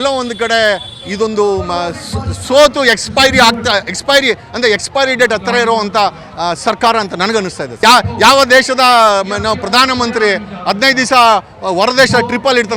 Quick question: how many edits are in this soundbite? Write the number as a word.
one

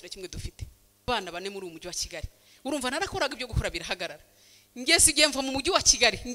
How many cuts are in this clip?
one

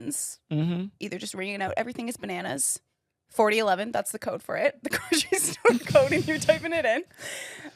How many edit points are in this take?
zero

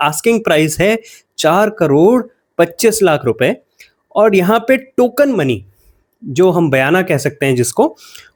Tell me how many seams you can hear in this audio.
zero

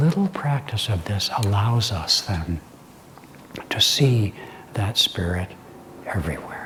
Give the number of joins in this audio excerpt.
zero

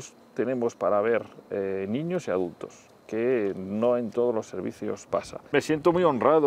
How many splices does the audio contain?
one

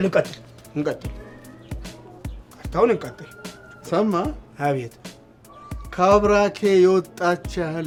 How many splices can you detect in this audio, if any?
zero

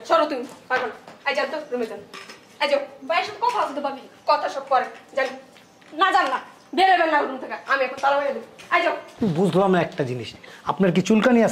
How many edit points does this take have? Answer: one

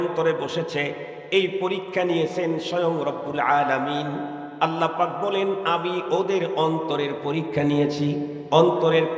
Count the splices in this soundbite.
zero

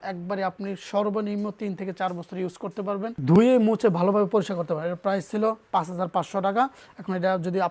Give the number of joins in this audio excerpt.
zero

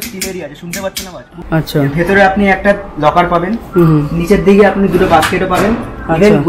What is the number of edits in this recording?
one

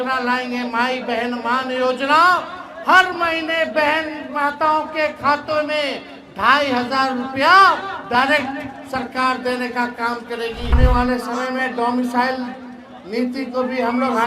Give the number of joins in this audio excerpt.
one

